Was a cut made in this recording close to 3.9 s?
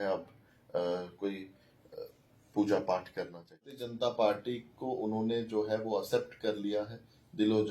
yes; 1 cut; at 3.9 s

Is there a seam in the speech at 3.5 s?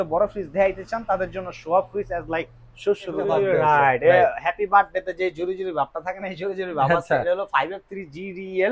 yes; 1 cut; at 3.5 s

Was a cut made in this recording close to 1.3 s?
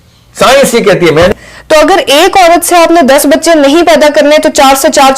yes; 1 cut; at 1.3 s

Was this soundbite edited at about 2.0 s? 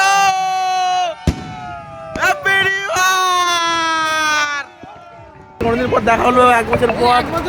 no; 1 cut; at 5.6 s

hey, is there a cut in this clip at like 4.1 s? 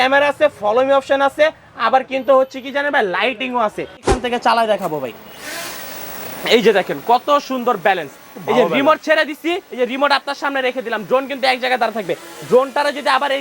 yes; 1 cut; at 4.1 s

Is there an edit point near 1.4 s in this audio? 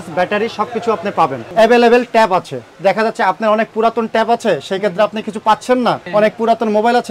yes; 2 cuts; at 1.4 s, 6.0 s

